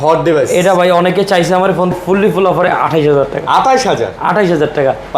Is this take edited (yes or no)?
yes